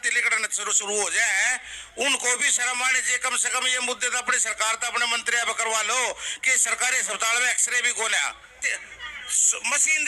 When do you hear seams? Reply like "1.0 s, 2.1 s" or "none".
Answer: 8.6 s